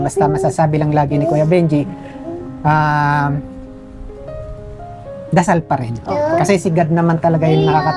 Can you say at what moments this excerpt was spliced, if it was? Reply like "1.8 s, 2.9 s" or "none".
none